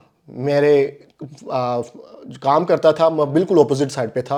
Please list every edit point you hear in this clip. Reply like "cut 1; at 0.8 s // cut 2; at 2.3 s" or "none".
none